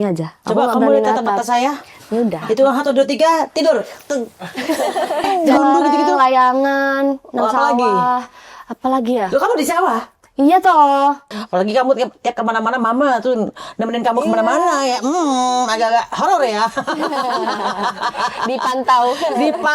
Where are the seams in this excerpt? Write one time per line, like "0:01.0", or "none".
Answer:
0:05.3
0:11.3